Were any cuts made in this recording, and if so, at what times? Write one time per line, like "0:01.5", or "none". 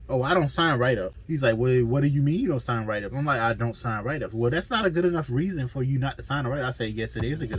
0:01.2